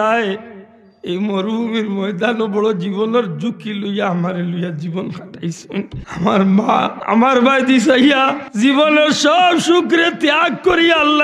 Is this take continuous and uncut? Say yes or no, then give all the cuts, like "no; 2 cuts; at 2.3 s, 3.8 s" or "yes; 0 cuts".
no; 3 cuts; at 6.0 s, 7.0 s, 8.4 s